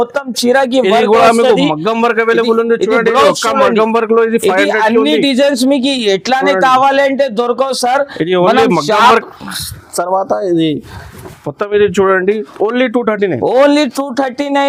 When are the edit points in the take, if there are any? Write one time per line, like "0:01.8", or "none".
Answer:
none